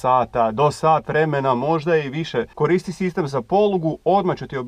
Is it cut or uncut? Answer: cut